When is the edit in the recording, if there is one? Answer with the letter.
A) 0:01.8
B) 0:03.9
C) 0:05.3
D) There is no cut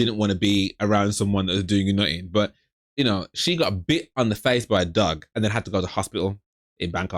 C